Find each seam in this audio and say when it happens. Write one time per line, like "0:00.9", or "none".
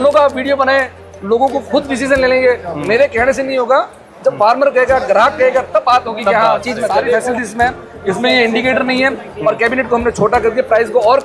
0:07.3

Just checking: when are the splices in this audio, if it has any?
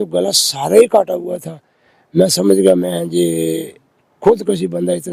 none

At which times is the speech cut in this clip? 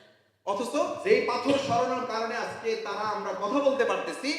0:01.0

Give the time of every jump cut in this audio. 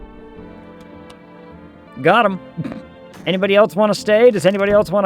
0:01.9

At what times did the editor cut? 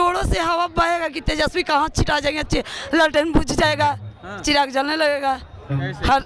none

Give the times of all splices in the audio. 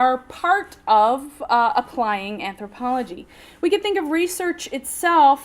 0:01.7

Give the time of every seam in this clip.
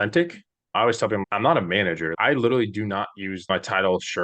0:01.2
0:02.1
0:03.5

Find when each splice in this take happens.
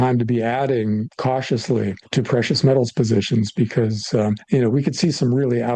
0:01.1
0:02.0
0:04.4

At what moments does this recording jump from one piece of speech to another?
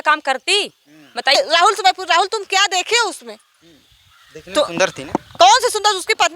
0:01.4

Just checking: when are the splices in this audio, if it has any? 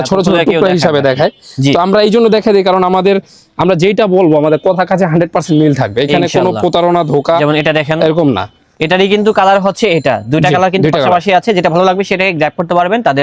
none

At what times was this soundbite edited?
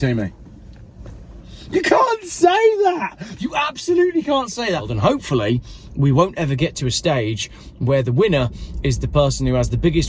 0:04.9

